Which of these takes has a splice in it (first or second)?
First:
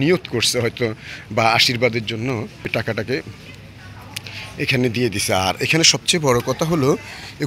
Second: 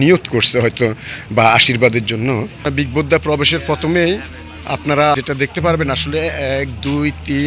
second